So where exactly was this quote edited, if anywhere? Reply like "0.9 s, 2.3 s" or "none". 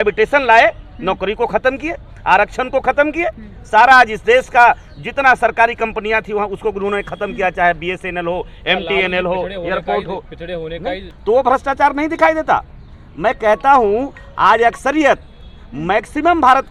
11.1 s